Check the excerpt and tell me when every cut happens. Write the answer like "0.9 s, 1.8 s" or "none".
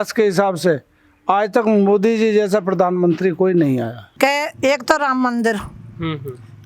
4.0 s